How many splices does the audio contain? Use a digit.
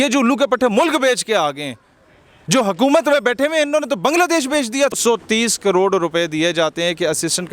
1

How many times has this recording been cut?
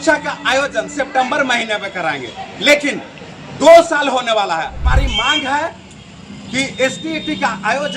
1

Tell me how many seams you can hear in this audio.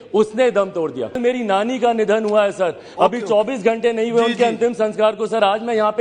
1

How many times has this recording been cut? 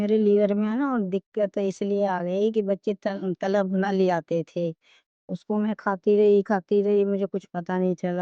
0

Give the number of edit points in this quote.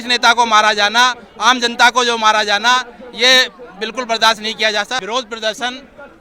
1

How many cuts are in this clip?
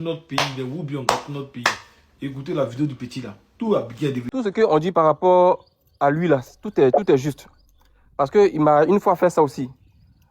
1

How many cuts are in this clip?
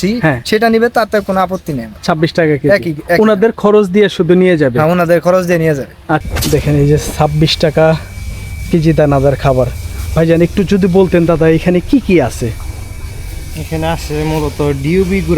1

